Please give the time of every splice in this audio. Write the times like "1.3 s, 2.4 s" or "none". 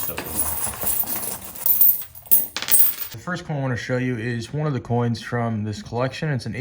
1.6 s, 3.1 s

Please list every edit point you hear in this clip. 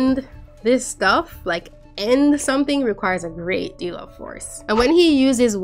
4.5 s

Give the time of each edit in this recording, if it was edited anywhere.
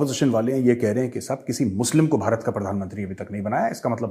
none

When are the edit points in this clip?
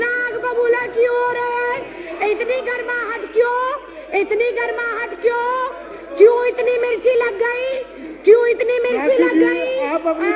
none

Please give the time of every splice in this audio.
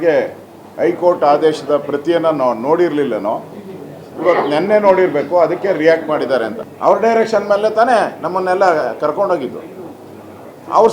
6.6 s

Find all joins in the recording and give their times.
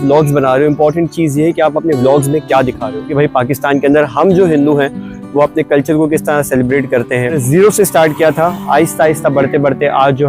3.1 s, 7.4 s

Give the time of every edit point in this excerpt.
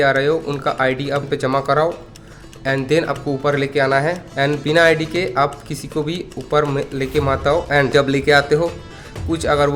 none

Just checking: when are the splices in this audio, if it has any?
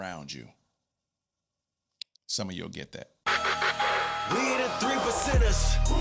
3.1 s

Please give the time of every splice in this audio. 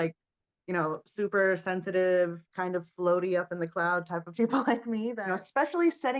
5.2 s

